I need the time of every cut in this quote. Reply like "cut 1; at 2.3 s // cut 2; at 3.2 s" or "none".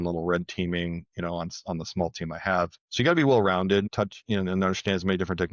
cut 1; at 2.8 s // cut 2; at 3.9 s